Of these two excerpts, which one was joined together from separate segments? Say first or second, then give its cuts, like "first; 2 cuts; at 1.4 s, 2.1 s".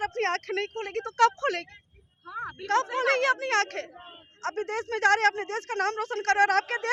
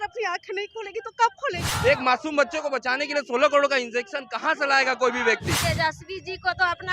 second; 2 cuts; at 1.7 s, 5.5 s